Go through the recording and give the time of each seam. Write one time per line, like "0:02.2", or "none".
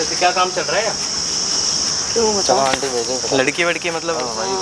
none